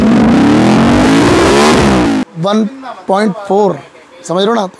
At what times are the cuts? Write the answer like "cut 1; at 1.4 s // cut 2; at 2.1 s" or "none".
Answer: cut 1; at 2.2 s